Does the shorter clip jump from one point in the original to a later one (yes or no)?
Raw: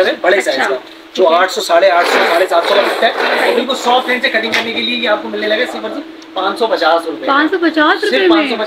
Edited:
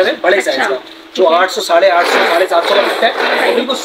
no